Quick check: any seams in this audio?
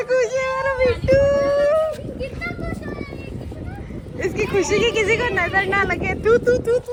no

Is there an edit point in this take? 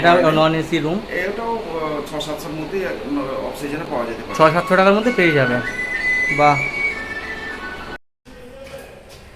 no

